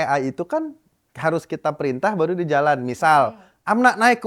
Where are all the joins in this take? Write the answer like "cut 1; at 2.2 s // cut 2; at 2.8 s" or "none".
none